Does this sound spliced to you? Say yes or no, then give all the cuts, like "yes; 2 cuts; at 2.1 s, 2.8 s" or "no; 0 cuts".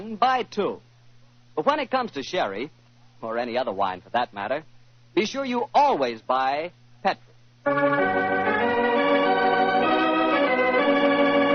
yes; 1 cut; at 5.3 s